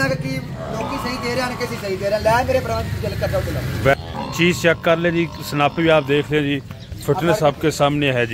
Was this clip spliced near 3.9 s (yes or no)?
yes